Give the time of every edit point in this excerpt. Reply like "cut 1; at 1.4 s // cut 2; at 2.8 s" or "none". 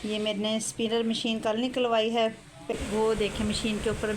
cut 1; at 2.7 s